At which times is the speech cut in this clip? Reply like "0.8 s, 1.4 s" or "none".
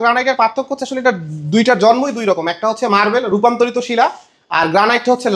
none